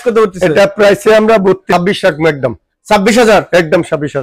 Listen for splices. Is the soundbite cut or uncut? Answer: cut